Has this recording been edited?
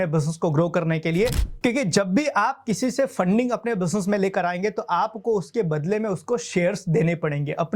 yes; 1 cut; at 1.4 s

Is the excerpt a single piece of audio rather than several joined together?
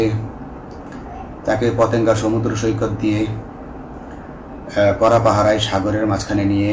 yes; 0 cuts

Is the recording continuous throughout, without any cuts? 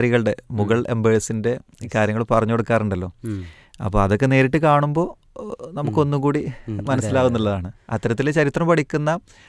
yes; 0 cuts

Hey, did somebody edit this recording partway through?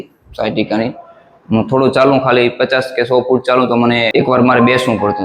yes; 1 cut; at 4.1 s

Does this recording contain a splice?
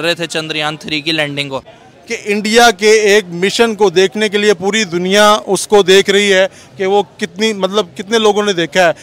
yes; 1 cut; at 1.8 s

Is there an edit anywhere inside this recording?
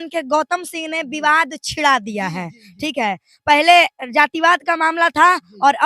no; 0 cuts

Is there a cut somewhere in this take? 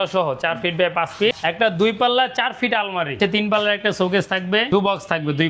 yes; 3 cuts; at 1.3 s, 3.2 s, 4.7 s

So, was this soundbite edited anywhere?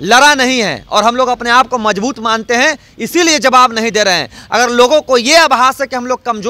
no; 0 cuts

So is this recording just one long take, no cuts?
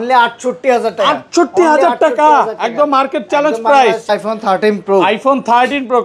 no; 1 cut; at 4.1 s

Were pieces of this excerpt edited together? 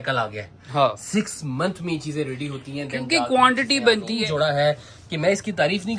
yes; 1 cut; at 4.1 s

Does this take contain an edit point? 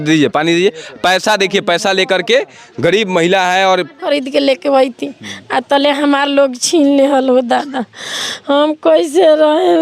yes; 1 cut; at 4.0 s

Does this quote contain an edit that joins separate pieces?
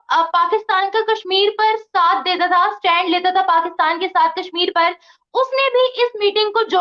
no; 0 cuts

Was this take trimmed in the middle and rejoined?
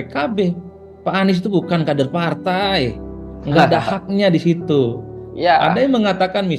no; 0 cuts

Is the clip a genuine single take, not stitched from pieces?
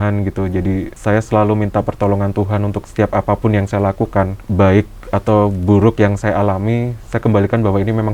no; 3 cuts; at 0.9 s, 2.8 s, 4.4 s

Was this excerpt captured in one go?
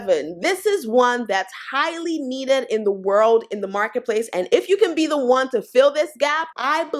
yes; 0 cuts

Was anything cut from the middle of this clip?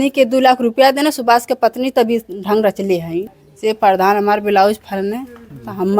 yes; 1 cut; at 3.3 s

